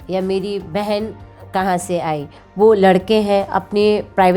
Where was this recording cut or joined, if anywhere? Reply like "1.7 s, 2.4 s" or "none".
2.4 s